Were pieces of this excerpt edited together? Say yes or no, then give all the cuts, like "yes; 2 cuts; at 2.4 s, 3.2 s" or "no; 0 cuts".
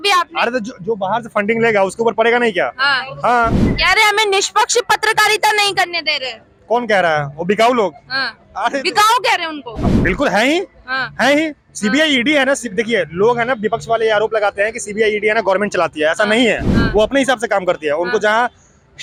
no; 0 cuts